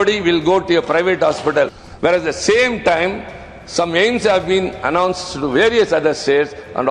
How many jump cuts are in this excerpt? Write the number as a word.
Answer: one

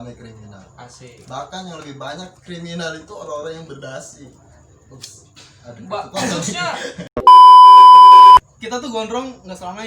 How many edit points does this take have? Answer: two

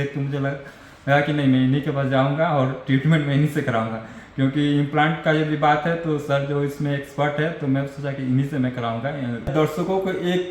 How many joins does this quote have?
one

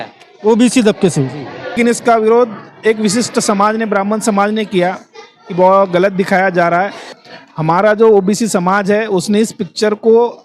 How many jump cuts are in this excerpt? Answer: two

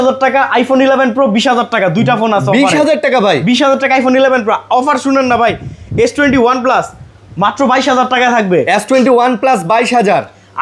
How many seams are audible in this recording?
zero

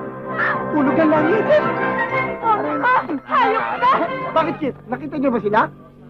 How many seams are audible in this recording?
one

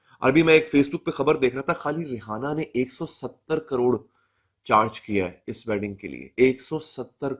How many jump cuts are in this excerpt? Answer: zero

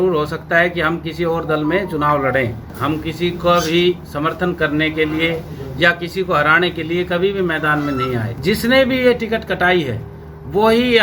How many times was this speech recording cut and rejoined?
two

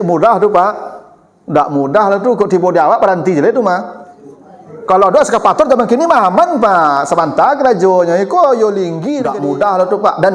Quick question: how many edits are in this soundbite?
one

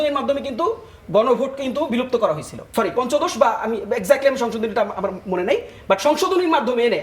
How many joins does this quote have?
one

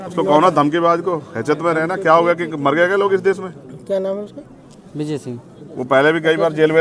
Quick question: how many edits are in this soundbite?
zero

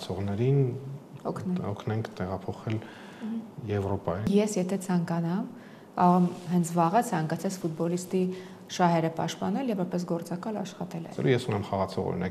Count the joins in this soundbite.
two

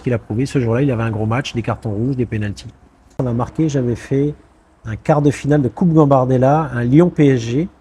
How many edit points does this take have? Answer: one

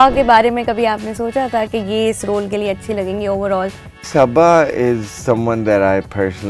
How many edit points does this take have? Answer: one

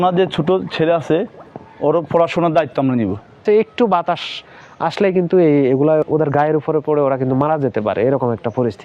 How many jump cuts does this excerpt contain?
two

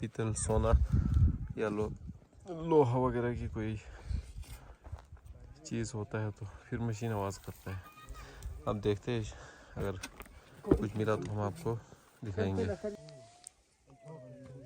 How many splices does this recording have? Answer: one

